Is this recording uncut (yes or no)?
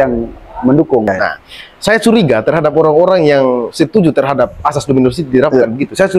no